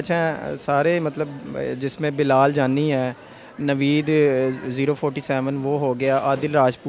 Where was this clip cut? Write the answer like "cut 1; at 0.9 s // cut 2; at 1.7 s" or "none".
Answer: none